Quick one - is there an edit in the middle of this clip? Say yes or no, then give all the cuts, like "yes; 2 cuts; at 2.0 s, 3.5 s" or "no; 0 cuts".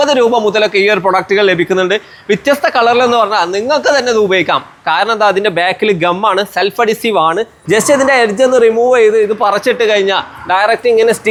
no; 0 cuts